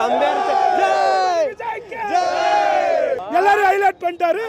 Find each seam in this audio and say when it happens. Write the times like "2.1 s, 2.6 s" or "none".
3.2 s